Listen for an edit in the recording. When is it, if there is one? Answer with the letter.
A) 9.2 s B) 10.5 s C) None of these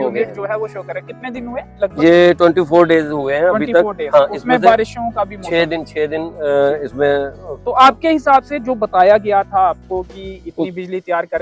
C